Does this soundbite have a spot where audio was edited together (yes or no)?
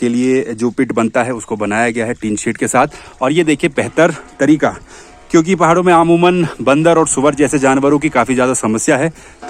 no